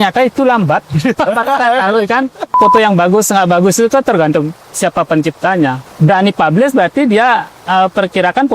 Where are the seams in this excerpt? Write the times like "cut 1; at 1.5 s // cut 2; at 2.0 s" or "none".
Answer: cut 1; at 2.6 s // cut 2; at 5.8 s